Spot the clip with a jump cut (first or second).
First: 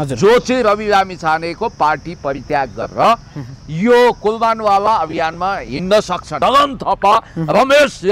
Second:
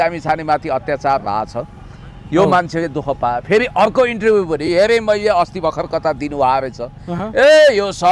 first